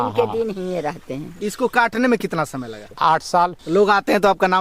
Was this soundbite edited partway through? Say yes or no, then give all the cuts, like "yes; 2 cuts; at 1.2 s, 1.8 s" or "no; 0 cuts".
yes; 3 cuts; at 1.3 s, 2.8 s, 3.6 s